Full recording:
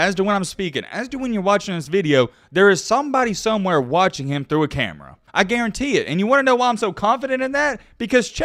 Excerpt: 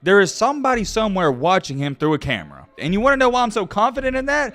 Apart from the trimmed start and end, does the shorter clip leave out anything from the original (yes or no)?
yes